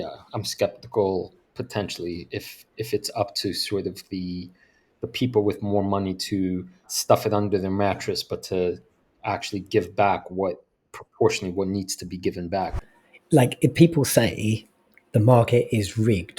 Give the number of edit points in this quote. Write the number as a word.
two